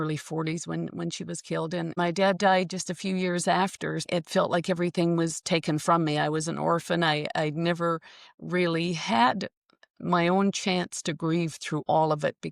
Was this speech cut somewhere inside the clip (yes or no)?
yes